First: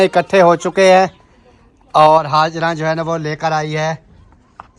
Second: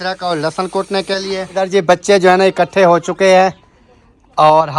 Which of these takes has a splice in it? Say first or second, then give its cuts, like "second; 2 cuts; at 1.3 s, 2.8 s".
second; 1 cut; at 1.5 s